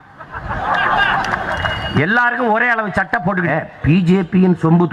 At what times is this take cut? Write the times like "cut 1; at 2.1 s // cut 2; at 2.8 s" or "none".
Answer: cut 1; at 3.5 s